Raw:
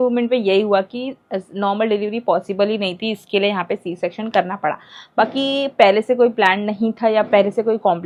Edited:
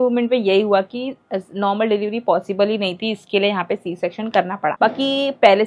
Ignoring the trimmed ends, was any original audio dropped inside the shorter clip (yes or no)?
yes